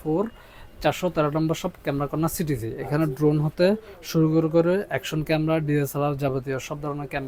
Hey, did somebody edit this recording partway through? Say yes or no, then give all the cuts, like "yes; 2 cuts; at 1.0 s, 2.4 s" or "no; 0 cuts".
no; 0 cuts